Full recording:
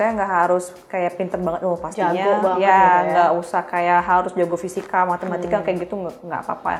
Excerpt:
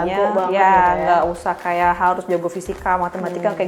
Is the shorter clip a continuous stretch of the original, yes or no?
yes